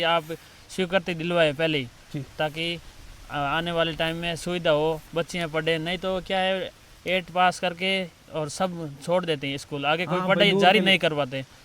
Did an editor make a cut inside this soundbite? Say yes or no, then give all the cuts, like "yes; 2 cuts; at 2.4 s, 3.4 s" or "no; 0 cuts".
no; 0 cuts